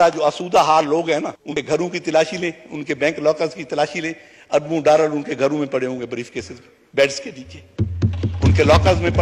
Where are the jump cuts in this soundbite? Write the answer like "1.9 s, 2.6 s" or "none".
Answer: 1.5 s